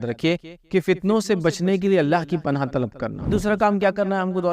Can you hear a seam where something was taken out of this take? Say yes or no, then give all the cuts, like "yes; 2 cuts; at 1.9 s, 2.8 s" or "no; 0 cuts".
yes; 1 cut; at 3.3 s